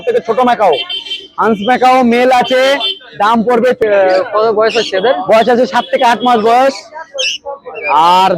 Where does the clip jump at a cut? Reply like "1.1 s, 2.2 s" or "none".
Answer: 3.8 s